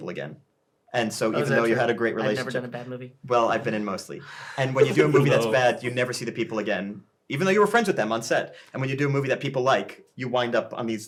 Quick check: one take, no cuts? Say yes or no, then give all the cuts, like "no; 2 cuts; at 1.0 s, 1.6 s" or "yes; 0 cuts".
yes; 0 cuts